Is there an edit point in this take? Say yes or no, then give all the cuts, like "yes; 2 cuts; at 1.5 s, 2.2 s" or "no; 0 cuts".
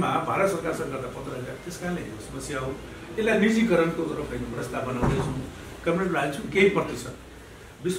no; 0 cuts